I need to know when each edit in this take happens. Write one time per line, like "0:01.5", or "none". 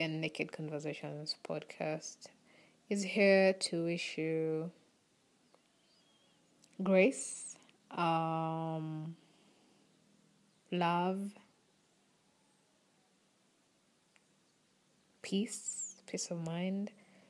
none